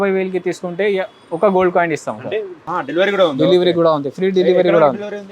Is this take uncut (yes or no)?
no